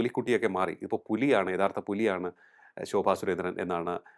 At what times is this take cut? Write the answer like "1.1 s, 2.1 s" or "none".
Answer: none